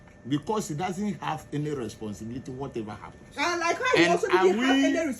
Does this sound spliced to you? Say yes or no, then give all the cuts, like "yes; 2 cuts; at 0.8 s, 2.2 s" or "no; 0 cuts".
no; 0 cuts